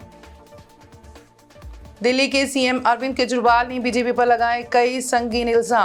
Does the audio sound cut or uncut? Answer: uncut